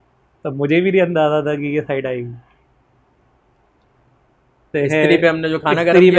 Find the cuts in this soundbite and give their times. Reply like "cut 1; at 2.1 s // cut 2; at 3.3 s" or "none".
cut 1; at 4.7 s